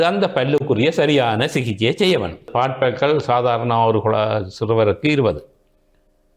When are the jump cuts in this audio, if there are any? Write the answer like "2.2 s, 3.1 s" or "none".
2.5 s